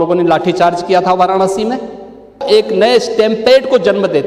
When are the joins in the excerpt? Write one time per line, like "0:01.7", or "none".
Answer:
0:02.4